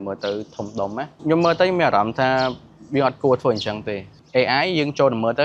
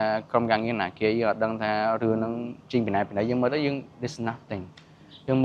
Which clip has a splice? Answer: first; 2 cuts; at 1.2 s, 4.2 s

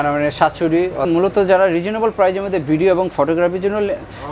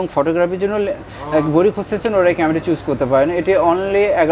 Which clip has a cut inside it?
first; 1 cut; at 1.0 s

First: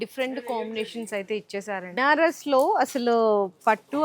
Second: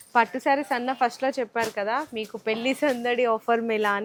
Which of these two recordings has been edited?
first; 1 cut; at 2.0 s

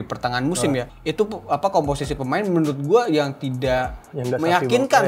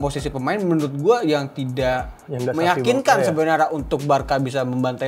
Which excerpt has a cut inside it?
first; 1 cut; at 0.9 s

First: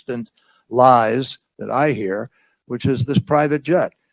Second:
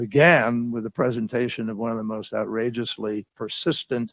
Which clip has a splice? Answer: first; 1 cut; at 1.4 s

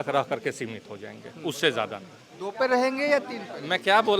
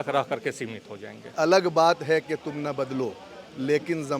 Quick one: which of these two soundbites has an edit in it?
second; 1 cut; at 1.3 s

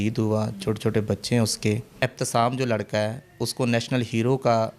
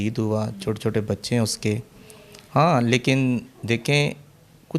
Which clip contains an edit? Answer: first; 1 cut; at 2.0 s

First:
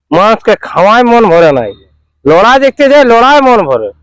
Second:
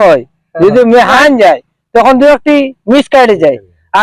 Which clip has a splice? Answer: second; 1 cut; at 1.1 s

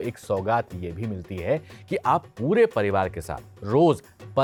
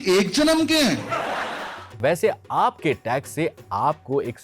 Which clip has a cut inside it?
second; 1 cut; at 1.7 s

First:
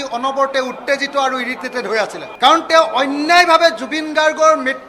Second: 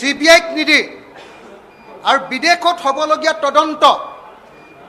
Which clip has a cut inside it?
first; 1 cut; at 2.2 s

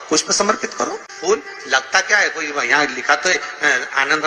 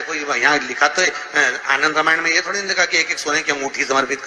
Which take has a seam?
first; 1 cut; at 1.1 s

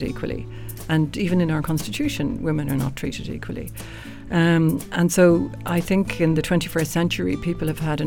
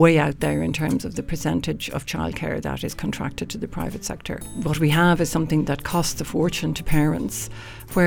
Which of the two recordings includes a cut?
second; 1 cut; at 4.4 s

